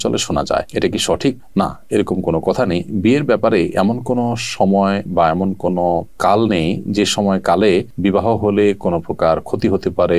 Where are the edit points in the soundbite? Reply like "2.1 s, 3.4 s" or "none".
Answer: none